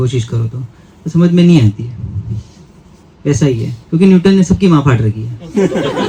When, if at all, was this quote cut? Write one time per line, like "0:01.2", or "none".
none